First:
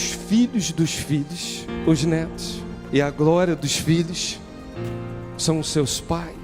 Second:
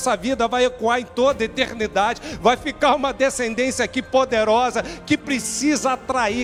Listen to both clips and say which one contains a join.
first; 1 cut; at 2.7 s

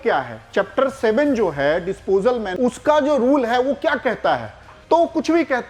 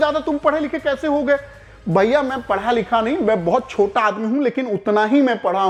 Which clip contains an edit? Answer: first; 1 cut; at 2.5 s

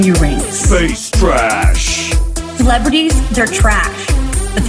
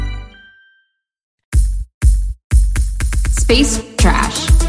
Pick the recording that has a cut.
second; 1 cut; at 1.3 s

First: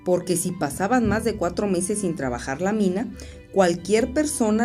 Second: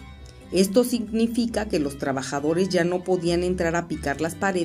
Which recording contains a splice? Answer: second; 1 cut; at 1.8 s

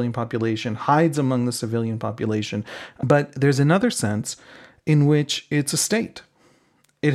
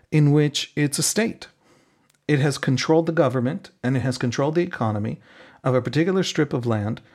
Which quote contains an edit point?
first; 1 cut; at 2.8 s

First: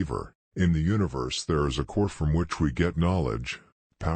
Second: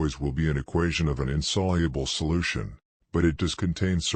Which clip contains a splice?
first; 1 cut; at 2.8 s

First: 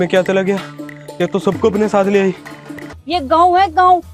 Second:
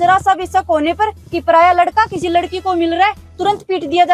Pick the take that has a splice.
first; 1 cut; at 2.9 s

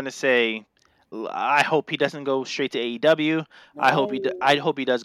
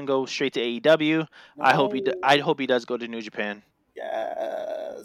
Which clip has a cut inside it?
first; 1 cut; at 1.0 s

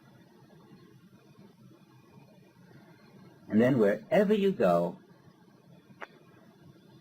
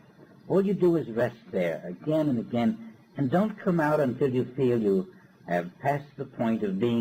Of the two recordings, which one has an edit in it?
first; 1 cut; at 1.6 s

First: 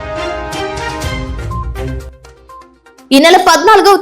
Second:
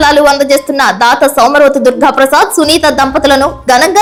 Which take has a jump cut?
first; 1 cut; at 2.1 s

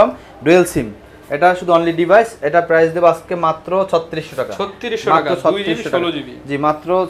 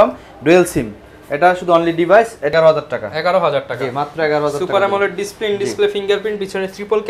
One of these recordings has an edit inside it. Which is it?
second; 1 cut; at 2.5 s

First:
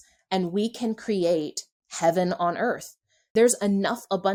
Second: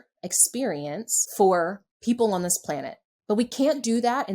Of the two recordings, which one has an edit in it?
second; 2 cuts; at 1.2 s, 1.9 s

